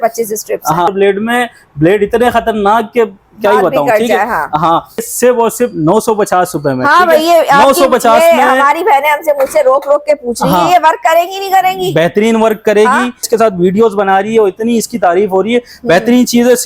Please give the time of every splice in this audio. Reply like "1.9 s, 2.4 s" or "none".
0.9 s, 5.1 s, 13.3 s